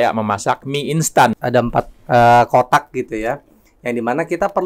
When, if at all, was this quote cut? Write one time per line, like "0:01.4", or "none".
0:01.4